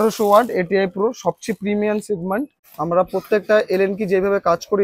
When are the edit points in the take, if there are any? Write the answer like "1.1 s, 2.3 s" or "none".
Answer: 2.6 s

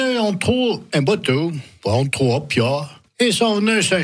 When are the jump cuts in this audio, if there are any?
3.0 s

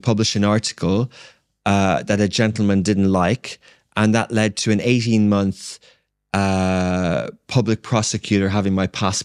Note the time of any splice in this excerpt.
none

